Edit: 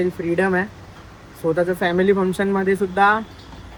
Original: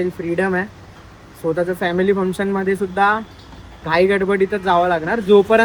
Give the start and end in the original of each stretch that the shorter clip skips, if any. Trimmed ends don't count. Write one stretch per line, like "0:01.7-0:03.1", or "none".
none